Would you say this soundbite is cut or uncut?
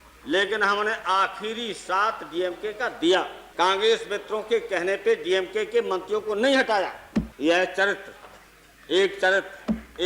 cut